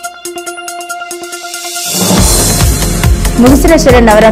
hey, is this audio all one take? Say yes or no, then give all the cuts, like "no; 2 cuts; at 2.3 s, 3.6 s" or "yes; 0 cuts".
yes; 0 cuts